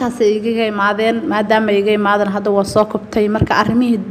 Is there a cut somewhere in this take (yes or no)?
no